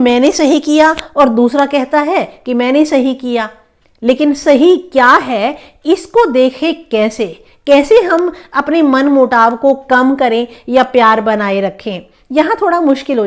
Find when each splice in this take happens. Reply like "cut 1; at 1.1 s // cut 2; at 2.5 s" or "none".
none